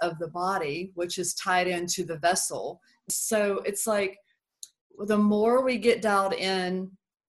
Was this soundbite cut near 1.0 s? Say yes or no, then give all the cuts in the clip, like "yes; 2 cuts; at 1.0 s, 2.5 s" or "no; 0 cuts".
no; 1 cut; at 3.1 s